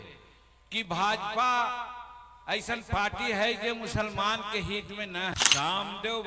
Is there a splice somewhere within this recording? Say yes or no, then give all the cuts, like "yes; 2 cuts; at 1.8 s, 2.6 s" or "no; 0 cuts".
yes; 1 cut; at 5.3 s